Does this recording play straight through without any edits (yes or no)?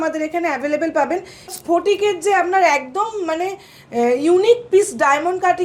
no